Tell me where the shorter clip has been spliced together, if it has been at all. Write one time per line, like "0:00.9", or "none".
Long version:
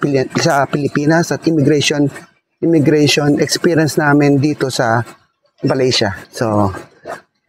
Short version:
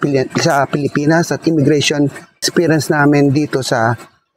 0:02.4